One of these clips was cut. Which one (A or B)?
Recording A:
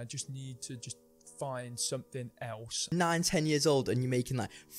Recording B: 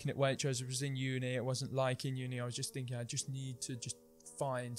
A